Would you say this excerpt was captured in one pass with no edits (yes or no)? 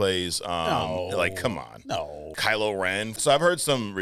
no